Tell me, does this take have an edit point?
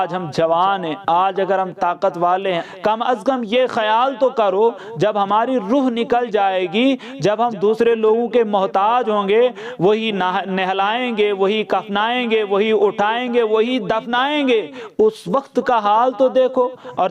no; 0 cuts

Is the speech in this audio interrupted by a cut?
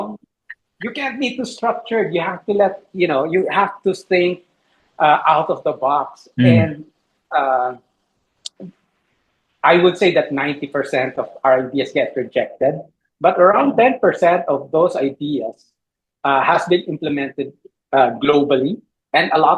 no; 0 cuts

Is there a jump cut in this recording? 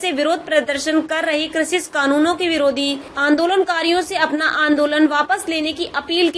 yes; 1 cut; at 3.1 s

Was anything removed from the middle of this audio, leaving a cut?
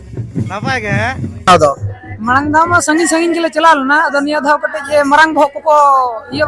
yes; 1 cut; at 1.5 s

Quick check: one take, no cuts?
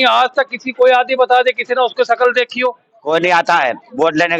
no; 1 cut; at 2.9 s

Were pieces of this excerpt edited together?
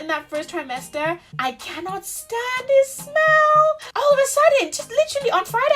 yes; 1 cut; at 3.9 s

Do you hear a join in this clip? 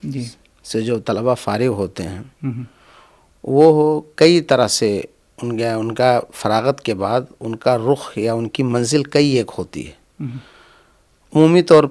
no; 0 cuts

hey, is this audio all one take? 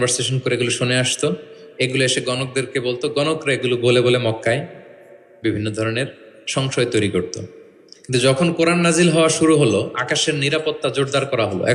yes; 0 cuts

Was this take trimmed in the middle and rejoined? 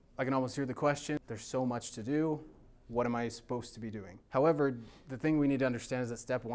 yes; 2 cuts; at 1.2 s, 4.1 s

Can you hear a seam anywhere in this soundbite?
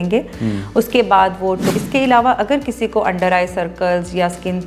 yes; 1 cut; at 1.7 s

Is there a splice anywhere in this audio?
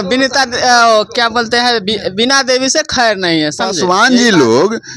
yes; 1 cut; at 3.8 s

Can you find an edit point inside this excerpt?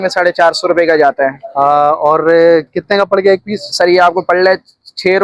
no; 0 cuts

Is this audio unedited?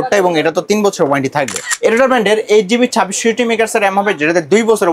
no; 1 cut; at 1.6 s

